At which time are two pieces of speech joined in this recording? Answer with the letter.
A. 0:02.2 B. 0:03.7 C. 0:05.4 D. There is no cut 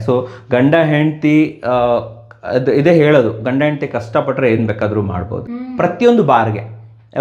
C